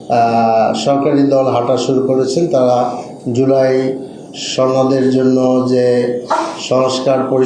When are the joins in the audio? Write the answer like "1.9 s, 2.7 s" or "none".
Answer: 3.0 s